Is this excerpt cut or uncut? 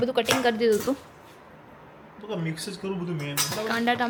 uncut